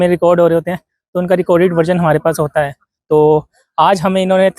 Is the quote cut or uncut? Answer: cut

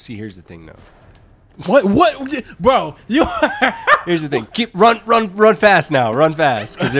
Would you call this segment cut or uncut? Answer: uncut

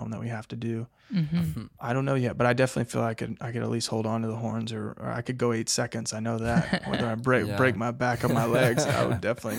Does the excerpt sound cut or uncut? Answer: cut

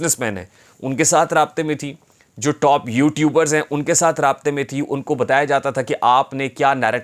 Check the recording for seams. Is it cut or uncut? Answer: uncut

